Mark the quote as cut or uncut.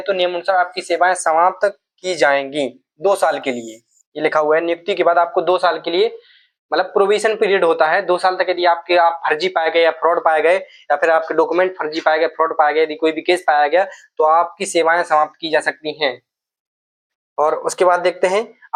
uncut